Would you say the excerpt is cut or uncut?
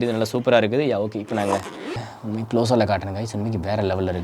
cut